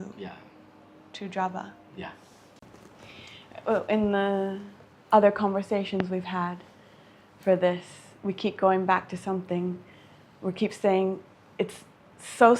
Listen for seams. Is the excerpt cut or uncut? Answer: cut